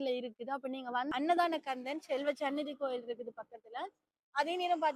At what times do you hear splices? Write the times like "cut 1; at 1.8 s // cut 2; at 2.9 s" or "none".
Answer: cut 1; at 1.1 s